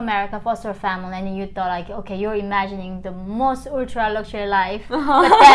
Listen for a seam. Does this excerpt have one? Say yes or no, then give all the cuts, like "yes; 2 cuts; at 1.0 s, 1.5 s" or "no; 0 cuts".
no; 0 cuts